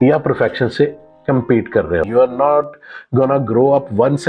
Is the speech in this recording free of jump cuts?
no; 1 cut; at 2.1 s

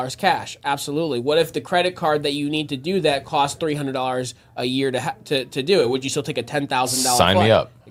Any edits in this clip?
no; 0 cuts

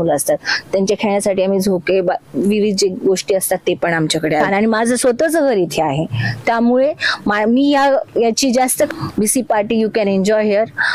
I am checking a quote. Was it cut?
yes; 2 cuts; at 4.5 s, 8.9 s

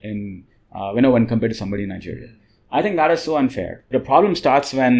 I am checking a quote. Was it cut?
yes; 1 cut; at 3.8 s

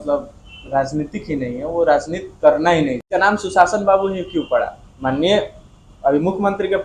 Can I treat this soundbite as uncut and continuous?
no; 1 cut; at 3.0 s

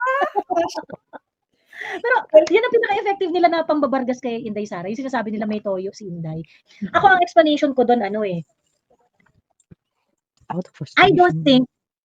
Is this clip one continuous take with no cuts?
no; 1 cut; at 6.5 s

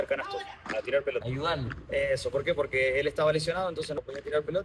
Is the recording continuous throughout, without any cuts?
no; 2 cuts; at 1.3 s, 3.9 s

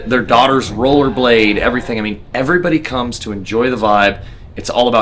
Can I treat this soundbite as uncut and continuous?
yes; 0 cuts

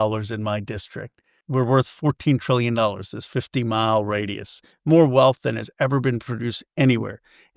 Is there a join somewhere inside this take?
yes; 1 cut; at 1.3 s

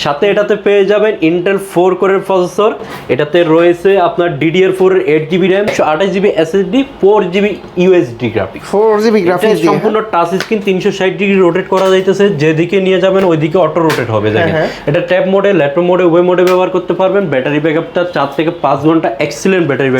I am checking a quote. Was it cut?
no; 0 cuts

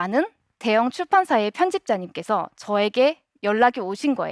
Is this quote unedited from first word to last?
yes; 0 cuts

